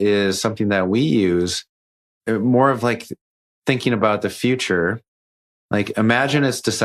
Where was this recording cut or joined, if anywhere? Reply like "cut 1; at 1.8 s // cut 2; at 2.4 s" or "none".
none

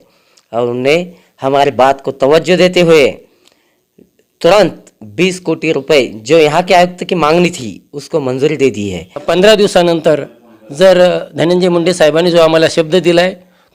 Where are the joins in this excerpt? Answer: cut 1; at 9.2 s

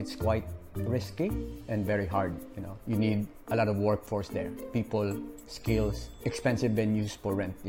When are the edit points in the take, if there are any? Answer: cut 1; at 3.4 s // cut 2; at 6.1 s

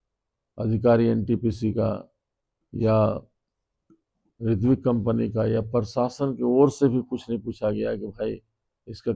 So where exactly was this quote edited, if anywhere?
none

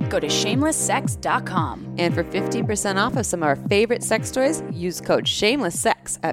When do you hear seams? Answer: none

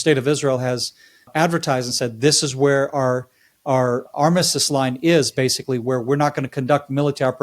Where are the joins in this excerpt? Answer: cut 1; at 1.3 s // cut 2; at 4.1 s

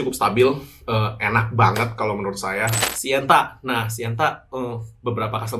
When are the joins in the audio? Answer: cut 1; at 2.8 s

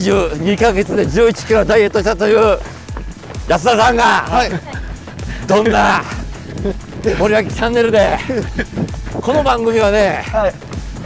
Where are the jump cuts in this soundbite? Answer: none

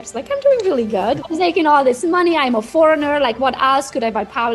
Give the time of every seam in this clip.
cut 1; at 1.2 s

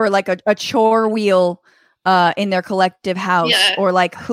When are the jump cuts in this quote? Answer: none

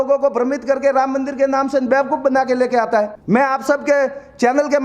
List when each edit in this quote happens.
cut 1; at 3.2 s

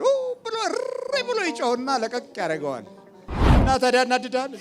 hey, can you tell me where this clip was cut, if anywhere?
cut 1; at 3.4 s

